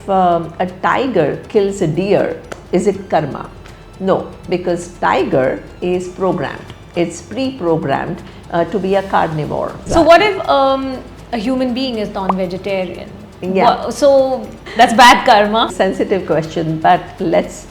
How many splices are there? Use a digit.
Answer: 2